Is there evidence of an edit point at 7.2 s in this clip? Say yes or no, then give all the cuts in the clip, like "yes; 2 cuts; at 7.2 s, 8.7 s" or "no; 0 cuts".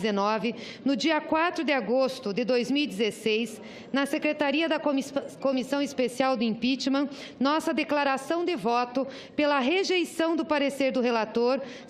yes; 1 cut; at 7.2 s